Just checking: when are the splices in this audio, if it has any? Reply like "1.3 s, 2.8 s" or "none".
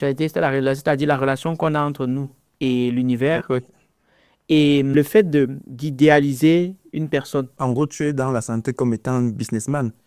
5.0 s, 7.5 s

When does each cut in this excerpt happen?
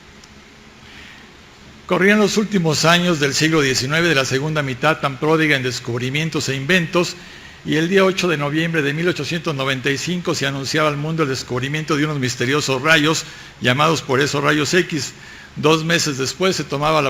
none

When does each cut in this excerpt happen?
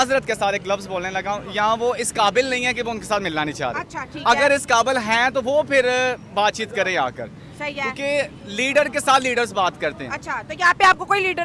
none

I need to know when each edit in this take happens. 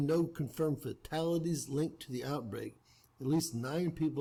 none

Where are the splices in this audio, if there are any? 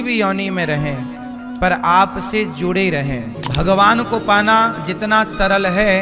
3.4 s

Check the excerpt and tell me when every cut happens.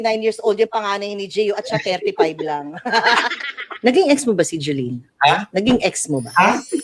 3.8 s

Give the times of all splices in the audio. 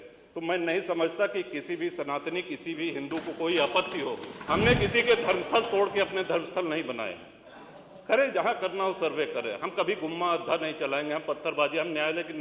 4.3 s

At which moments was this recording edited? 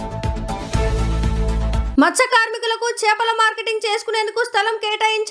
none

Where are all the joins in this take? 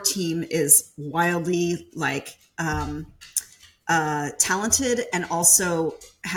none

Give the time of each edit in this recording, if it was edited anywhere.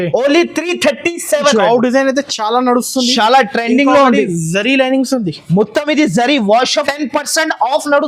1.5 s, 6.8 s

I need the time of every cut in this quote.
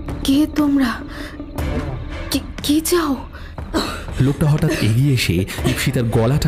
none

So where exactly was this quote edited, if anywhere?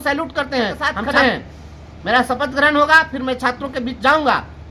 1.0 s

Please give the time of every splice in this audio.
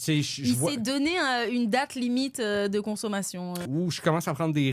3.6 s

